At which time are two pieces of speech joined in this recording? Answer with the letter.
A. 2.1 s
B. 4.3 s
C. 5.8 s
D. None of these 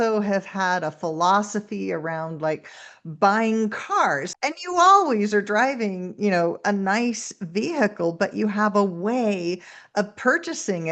B